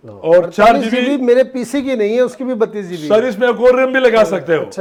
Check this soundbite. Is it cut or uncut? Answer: uncut